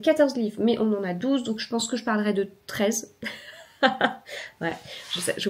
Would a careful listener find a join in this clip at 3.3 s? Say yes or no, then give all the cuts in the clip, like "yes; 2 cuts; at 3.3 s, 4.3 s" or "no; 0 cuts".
no; 0 cuts